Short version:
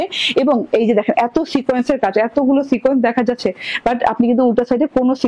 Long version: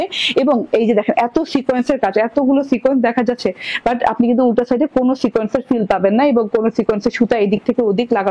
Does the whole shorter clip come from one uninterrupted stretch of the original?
yes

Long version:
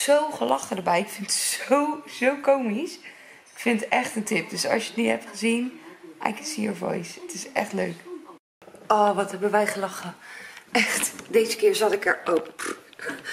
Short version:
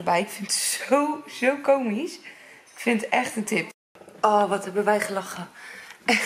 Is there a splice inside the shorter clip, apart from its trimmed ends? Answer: yes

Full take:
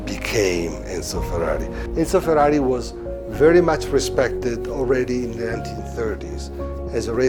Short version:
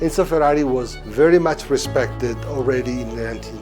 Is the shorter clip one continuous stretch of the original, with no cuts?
no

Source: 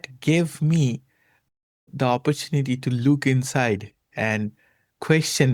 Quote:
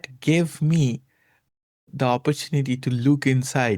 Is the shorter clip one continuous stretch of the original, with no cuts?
yes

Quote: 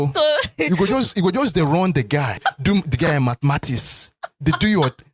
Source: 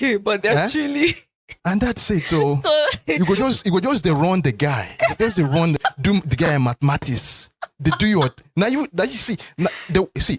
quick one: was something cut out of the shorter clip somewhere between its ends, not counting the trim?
yes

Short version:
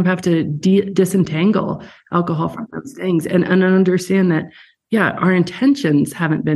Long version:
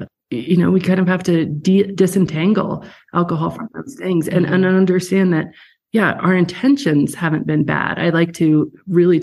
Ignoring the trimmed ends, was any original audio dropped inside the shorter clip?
no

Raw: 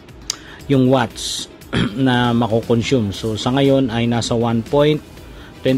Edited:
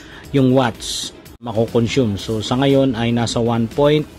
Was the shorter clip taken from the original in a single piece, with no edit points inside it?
no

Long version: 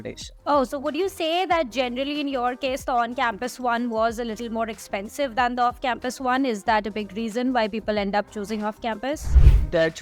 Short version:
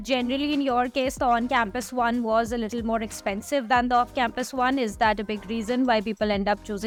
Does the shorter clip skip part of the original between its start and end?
no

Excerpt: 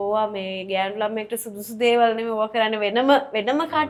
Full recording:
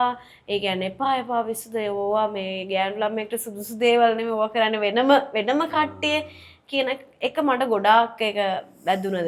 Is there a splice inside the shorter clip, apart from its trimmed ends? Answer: no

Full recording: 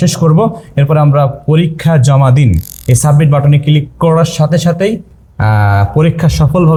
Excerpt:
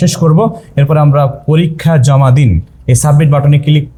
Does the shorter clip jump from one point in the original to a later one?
no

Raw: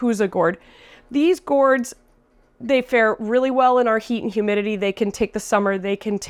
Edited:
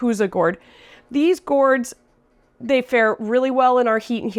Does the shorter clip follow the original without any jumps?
yes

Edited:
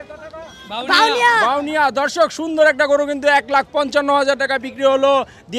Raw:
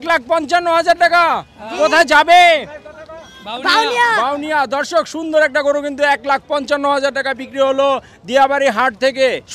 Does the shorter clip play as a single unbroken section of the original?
yes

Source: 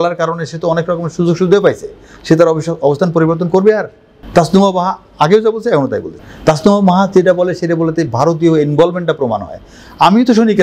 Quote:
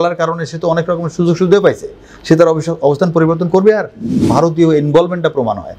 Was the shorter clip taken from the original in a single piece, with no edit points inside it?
no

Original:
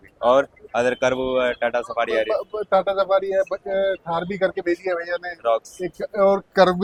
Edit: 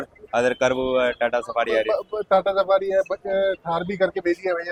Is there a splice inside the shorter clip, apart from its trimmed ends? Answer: no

